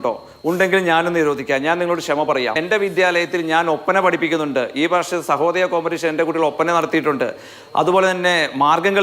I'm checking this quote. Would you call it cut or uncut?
cut